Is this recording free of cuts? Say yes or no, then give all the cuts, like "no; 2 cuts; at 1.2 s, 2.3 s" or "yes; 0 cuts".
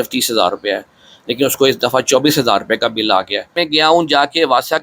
no; 1 cut; at 3.6 s